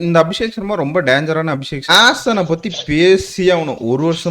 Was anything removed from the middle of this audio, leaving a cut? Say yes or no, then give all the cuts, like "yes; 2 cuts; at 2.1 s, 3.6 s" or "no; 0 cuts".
yes; 1 cut; at 1.9 s